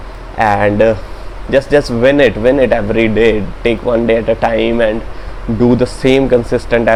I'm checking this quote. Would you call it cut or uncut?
uncut